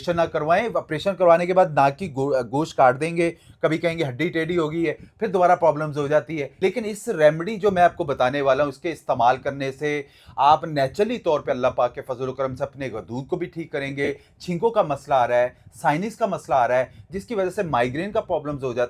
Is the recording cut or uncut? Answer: cut